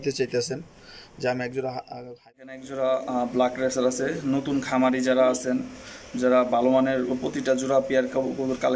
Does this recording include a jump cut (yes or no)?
yes